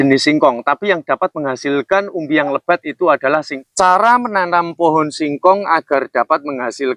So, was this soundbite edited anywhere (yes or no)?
yes